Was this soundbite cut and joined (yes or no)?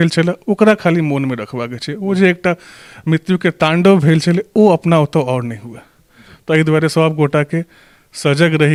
no